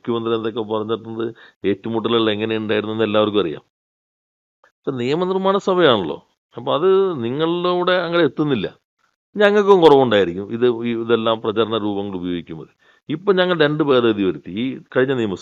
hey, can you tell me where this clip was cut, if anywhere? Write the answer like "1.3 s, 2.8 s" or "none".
none